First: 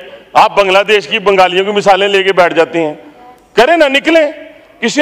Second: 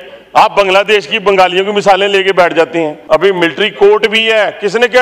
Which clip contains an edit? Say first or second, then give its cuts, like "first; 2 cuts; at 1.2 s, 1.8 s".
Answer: second; 1 cut; at 3.0 s